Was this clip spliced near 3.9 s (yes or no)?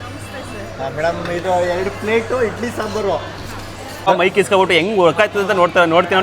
yes